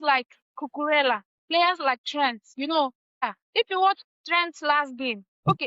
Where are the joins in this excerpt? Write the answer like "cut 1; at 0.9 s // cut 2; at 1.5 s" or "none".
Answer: cut 1; at 2.4 s // cut 2; at 3.2 s

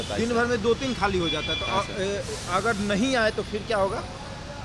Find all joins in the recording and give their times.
none

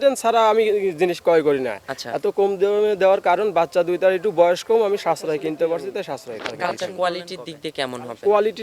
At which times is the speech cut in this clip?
cut 1; at 6.5 s

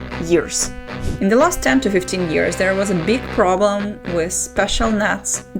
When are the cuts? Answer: cut 1; at 1.0 s

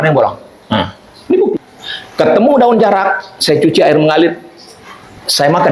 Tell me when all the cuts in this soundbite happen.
cut 1; at 1.5 s

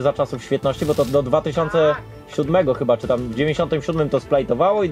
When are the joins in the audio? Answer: cut 1; at 3.3 s

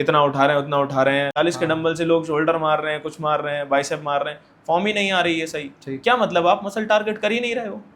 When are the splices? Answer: cut 1; at 1.3 s

